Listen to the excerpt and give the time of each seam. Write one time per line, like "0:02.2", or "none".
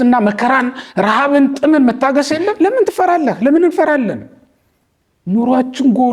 0:02.5